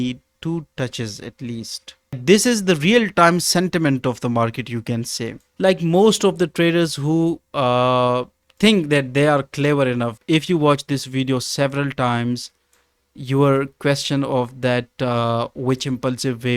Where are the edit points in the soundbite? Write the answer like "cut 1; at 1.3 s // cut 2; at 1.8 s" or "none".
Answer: cut 1; at 2.2 s // cut 2; at 5.5 s // cut 3; at 10.1 s